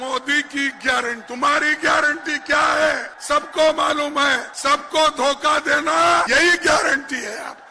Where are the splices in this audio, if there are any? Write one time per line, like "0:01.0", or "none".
0:01.2
0:03.1
0:04.5
0:06.3